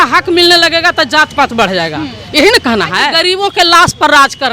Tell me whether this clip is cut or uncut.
cut